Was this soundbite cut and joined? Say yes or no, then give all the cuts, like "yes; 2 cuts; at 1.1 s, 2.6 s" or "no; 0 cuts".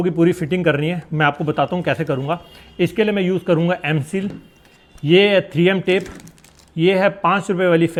no; 0 cuts